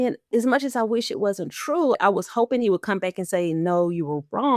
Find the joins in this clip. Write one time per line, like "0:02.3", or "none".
0:01.9